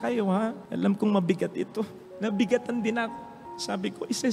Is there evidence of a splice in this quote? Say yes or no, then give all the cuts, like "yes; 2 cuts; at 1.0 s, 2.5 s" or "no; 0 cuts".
no; 0 cuts